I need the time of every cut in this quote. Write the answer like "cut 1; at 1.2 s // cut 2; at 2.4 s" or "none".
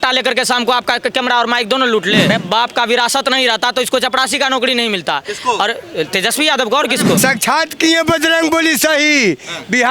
cut 1; at 2.3 s // cut 2; at 7.2 s